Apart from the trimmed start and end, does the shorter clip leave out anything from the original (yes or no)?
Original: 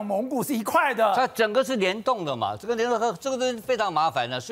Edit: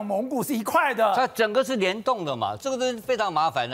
yes